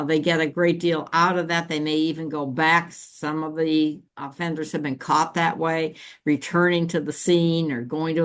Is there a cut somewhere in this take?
no; 0 cuts

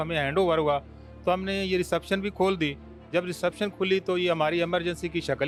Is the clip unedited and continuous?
yes; 0 cuts

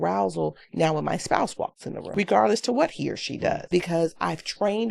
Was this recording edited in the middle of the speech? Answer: yes; 2 cuts; at 2.1 s, 3.6 s

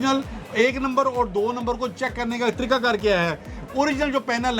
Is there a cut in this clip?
no; 0 cuts

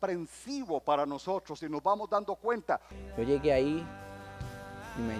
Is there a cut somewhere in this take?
yes; 1 cut; at 2.9 s

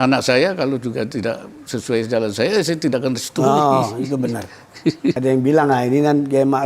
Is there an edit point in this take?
yes; 1 cut; at 5.2 s

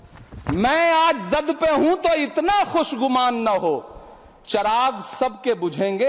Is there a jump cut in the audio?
no; 0 cuts

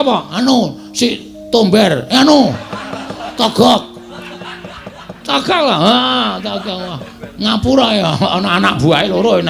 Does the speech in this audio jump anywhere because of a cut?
yes; 1 cut; at 5.2 s

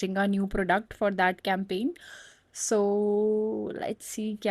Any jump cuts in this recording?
no; 0 cuts

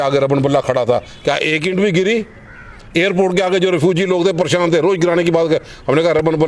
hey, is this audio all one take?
yes; 0 cuts

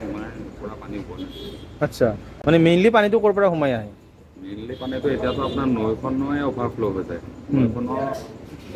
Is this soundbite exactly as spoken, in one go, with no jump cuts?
yes; 0 cuts

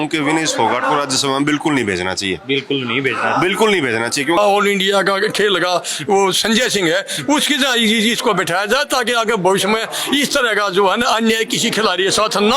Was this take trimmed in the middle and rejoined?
yes; 1 cut; at 4.4 s

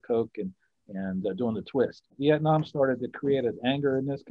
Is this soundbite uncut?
no; 1 cut; at 2.1 s

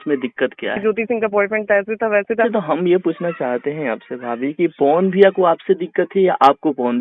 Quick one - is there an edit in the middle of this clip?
yes; 2 cuts; at 0.8 s, 2.5 s

